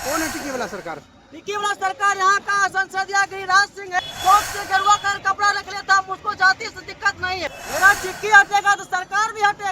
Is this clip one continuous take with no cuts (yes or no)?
no